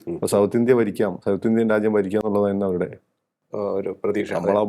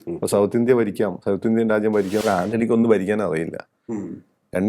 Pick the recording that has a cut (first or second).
second